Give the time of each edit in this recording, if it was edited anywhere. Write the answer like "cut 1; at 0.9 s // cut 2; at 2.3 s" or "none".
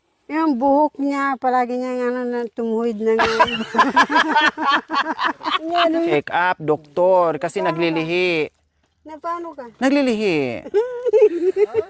cut 1; at 6.0 s